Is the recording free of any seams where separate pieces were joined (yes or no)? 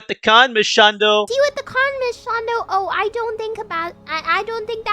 no